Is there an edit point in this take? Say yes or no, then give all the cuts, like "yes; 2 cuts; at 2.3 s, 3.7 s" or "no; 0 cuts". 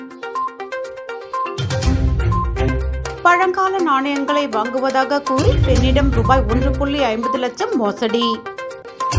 yes; 1 cut; at 0.9 s